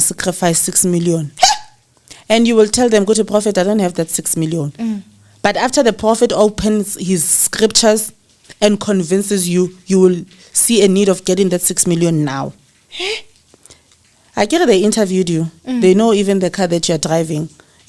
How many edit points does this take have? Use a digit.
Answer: 0